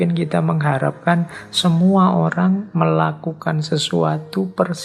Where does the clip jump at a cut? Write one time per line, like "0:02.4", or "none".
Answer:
none